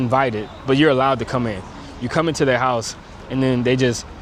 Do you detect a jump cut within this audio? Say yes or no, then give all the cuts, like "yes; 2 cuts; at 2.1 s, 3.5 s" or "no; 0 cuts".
no; 0 cuts